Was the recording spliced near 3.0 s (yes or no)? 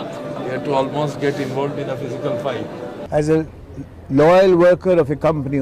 yes